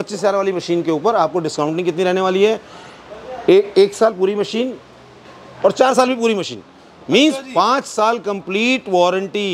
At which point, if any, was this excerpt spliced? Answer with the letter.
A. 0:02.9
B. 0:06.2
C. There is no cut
C